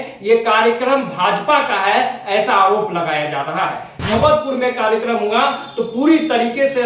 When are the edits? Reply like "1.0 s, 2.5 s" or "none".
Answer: 4.1 s